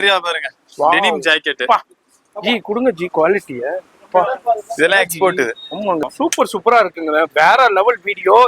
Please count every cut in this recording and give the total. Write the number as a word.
one